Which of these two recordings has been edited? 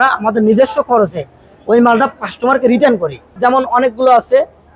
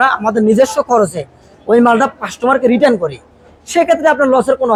first; 1 cut; at 3.3 s

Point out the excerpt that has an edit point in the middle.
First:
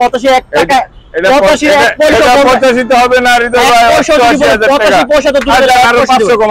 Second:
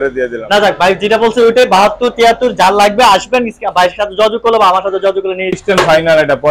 second; 1 cut; at 5.6 s

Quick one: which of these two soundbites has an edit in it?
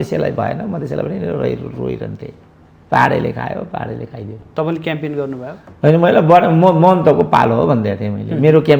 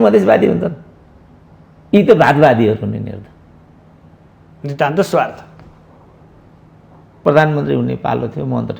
second; 1 cut; at 7.2 s

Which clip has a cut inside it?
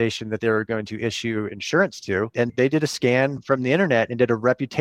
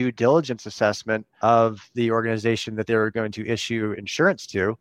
second; 1 cut; at 1.3 s

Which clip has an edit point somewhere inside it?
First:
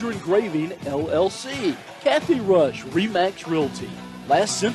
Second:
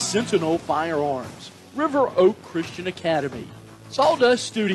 first; 1 cut; at 1.9 s

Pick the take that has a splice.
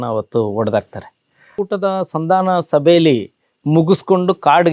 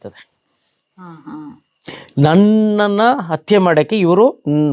first; 1 cut; at 1.5 s

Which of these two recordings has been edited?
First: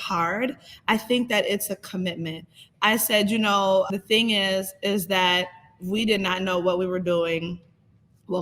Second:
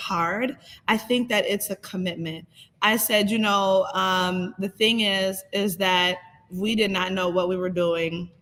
first; 1 cut; at 3.9 s

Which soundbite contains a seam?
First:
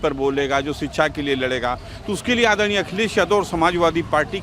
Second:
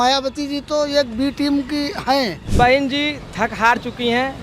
second; 1 cut; at 2.4 s

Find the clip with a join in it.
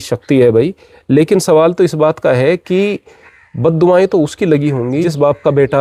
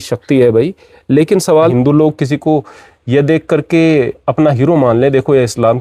second; 1 cut; at 1.7 s

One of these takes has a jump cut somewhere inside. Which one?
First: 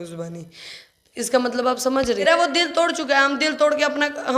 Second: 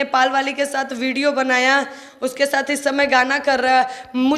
first; 1 cut; at 2.2 s

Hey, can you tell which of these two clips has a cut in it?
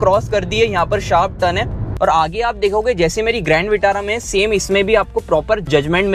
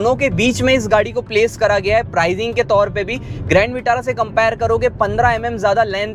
first; 1 cut; at 1.9 s

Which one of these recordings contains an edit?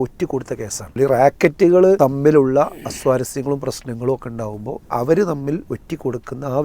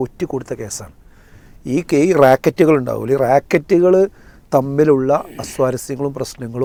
first; 3 cuts; at 0.9 s, 2.0 s, 5.7 s

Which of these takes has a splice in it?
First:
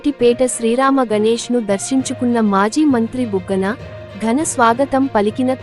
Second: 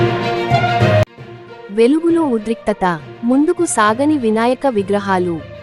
second; 1 cut; at 1.1 s

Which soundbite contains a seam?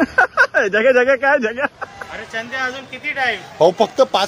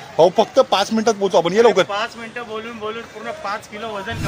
first; 1 cut; at 2.3 s

